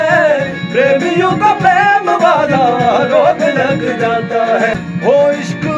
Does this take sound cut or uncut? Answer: cut